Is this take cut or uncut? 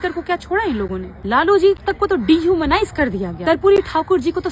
cut